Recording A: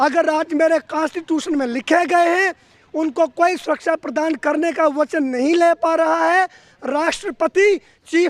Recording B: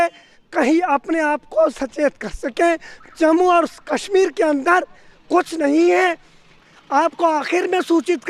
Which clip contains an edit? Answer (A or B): B